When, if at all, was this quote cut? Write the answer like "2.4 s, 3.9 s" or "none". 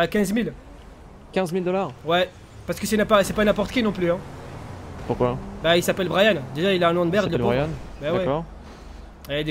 none